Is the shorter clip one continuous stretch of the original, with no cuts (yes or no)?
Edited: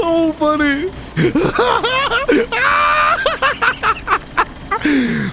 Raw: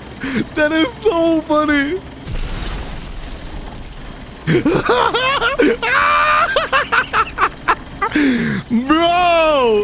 no